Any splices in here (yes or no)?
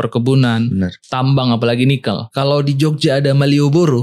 yes